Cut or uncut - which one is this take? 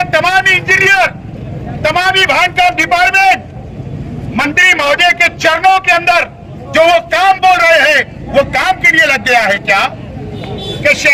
uncut